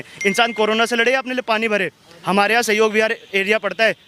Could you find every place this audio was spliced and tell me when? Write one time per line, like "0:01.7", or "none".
none